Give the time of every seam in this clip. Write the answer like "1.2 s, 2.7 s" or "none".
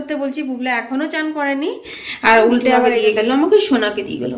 2.8 s